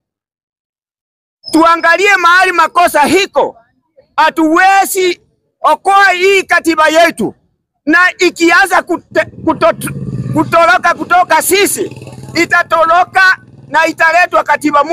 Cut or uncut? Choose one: uncut